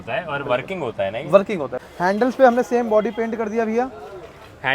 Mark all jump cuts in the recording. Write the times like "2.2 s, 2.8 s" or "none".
1.8 s